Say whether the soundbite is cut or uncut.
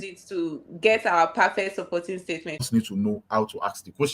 cut